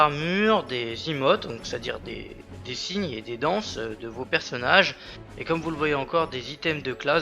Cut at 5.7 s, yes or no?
no